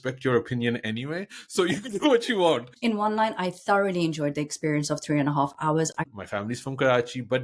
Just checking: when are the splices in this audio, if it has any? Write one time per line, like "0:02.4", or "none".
0:02.7
0:06.0